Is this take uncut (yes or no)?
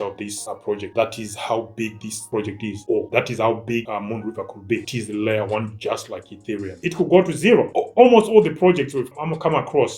no